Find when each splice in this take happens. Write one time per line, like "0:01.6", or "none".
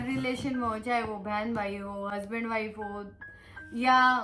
none